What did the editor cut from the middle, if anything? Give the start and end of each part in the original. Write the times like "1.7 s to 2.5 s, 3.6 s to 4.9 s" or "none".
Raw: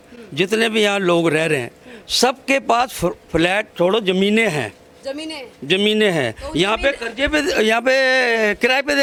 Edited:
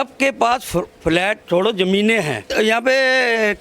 4.8 s to 7.5 s